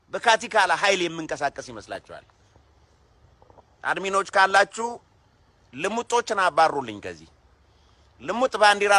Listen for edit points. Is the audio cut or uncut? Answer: uncut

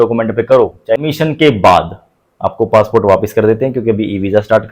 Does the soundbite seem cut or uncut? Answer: cut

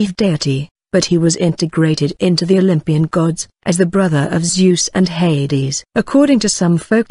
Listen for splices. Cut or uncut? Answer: cut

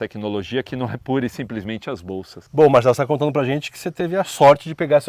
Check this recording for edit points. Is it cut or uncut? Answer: cut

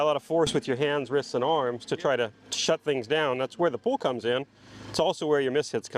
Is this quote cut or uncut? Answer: uncut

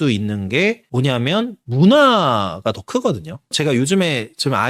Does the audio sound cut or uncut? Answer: uncut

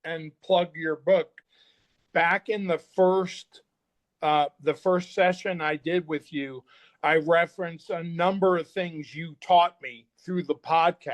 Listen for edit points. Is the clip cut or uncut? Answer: cut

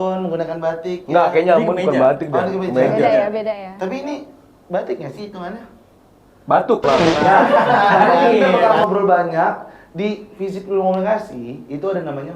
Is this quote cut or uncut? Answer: cut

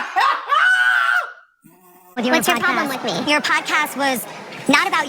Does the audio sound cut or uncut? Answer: cut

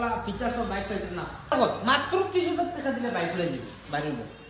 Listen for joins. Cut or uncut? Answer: cut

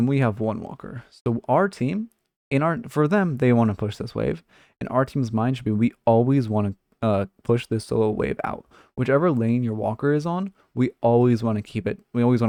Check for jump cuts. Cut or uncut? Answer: uncut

